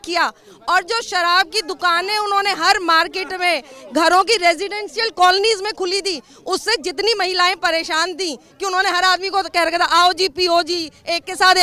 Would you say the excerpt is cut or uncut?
uncut